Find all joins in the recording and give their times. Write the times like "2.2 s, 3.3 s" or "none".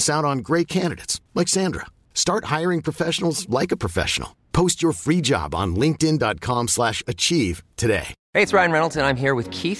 8.2 s